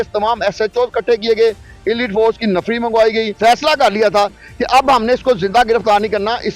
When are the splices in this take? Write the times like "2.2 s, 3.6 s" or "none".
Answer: 3.3 s